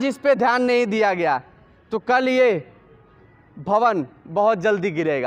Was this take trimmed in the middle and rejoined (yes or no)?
no